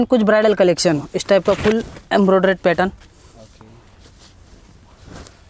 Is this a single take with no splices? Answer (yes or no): no